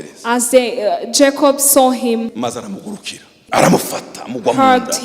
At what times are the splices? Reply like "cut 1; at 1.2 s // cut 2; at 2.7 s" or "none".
cut 1; at 2.3 s // cut 2; at 3.4 s